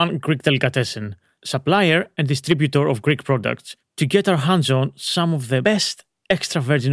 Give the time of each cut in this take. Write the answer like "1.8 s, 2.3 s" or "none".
5.6 s